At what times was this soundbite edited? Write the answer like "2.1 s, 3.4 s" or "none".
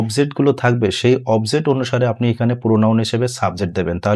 none